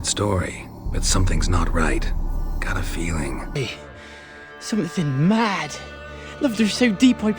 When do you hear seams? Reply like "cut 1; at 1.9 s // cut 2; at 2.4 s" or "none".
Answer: cut 1; at 3.6 s